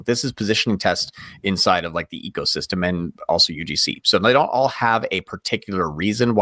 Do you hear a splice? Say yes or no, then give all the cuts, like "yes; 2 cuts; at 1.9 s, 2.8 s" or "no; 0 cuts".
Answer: no; 0 cuts